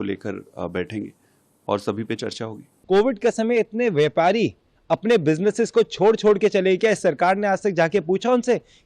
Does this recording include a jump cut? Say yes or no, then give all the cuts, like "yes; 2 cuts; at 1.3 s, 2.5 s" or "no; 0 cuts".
yes; 1 cut; at 2.6 s